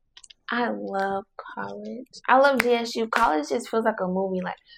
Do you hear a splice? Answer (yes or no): no